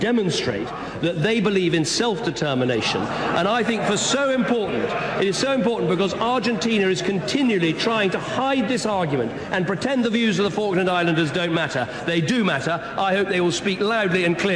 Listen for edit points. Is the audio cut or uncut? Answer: uncut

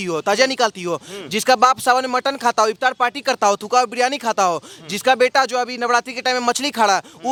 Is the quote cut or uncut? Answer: uncut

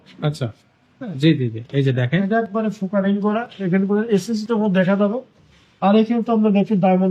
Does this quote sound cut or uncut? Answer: uncut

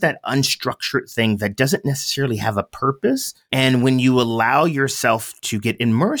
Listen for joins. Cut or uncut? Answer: cut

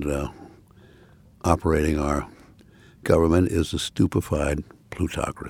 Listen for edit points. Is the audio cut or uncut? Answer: uncut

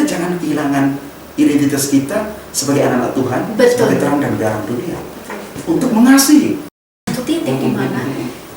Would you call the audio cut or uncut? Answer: cut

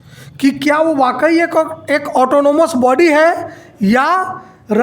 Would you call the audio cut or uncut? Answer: uncut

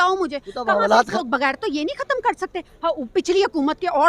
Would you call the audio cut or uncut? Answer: cut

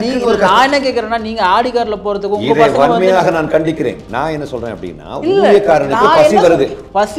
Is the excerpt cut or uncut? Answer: uncut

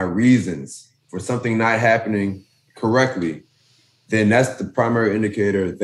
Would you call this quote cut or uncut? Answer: uncut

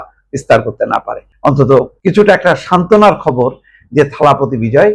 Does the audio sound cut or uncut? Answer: cut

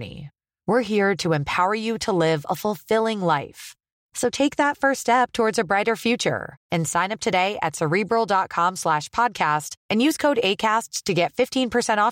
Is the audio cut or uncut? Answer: uncut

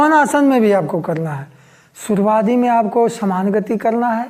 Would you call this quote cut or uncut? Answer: uncut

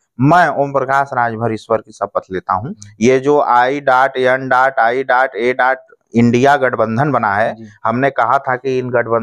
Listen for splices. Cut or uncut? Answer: cut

